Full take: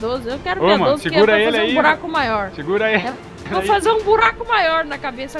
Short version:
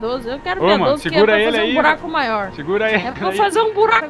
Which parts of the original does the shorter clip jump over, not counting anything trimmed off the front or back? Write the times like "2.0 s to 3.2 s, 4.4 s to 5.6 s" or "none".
3.1 s to 3.4 s

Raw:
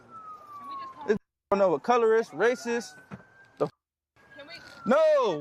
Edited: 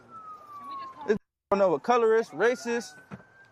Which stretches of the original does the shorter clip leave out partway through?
none

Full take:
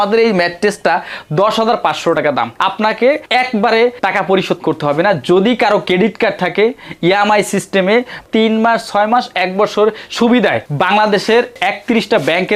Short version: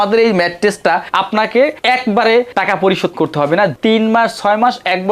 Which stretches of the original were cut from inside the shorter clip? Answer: 1.1 s to 2.5 s, 5.2 s to 8.2 s

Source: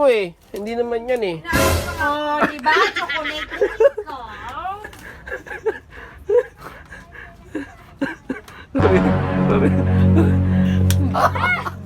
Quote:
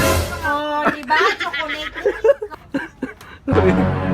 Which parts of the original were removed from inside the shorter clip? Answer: 4.1 s to 7.8 s

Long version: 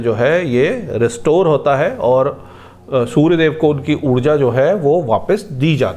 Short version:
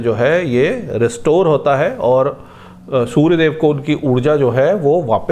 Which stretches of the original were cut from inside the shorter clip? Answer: none

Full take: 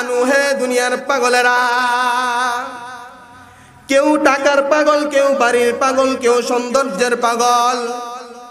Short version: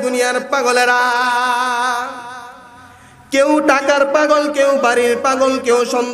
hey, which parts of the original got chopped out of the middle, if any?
none

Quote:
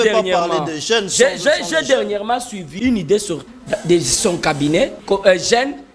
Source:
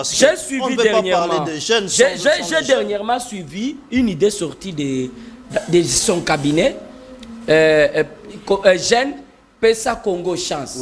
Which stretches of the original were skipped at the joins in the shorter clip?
3.5 s to 3.8 s, 4.6 s to 5.4 s, 6.8 s to 8.4 s

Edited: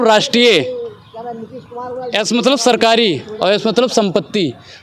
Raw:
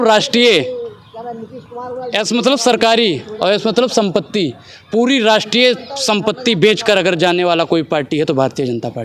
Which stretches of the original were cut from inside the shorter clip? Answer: none

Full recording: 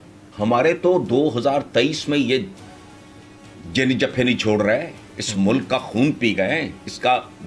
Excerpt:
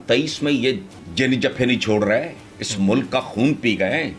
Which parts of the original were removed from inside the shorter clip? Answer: 2.6 s to 3.5 s

